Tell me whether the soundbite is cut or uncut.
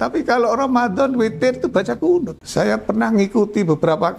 cut